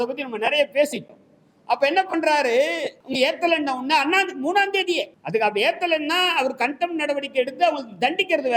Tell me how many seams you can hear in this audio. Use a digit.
2